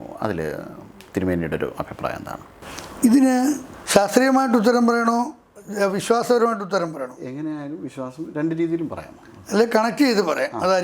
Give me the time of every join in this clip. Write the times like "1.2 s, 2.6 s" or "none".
3.7 s